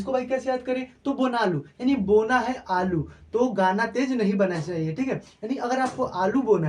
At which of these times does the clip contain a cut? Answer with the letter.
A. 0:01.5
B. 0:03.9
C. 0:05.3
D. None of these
D